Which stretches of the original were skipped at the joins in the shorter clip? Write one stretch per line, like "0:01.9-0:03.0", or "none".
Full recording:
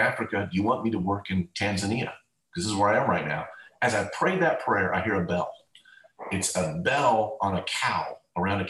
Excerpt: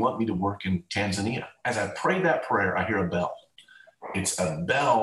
0:02.2-0:03.7